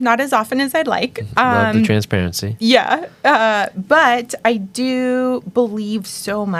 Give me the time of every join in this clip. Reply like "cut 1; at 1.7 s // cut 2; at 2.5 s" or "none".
none